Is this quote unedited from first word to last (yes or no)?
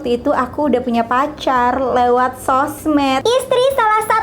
yes